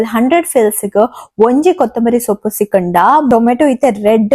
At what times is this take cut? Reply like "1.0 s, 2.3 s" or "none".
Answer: 3.3 s